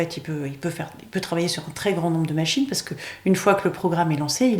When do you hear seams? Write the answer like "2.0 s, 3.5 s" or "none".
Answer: none